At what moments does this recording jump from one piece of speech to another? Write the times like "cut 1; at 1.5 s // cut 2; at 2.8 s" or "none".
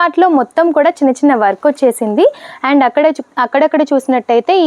none